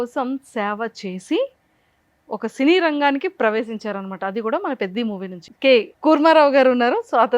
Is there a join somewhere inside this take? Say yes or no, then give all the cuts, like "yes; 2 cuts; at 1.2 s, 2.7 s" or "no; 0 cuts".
yes; 1 cut; at 5.4 s